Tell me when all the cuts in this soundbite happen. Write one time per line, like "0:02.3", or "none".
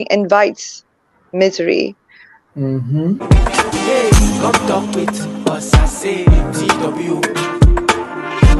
0:03.2